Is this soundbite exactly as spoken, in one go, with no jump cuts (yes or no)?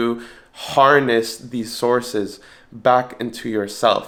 yes